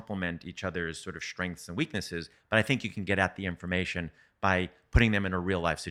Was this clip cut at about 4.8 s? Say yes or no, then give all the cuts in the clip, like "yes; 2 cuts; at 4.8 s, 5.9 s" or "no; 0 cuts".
no; 1 cut; at 2.3 s